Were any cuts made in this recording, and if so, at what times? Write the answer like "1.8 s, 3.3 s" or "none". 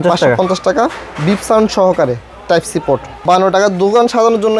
3.1 s